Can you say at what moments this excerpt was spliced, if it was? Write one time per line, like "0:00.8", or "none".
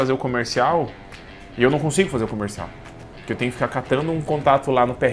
none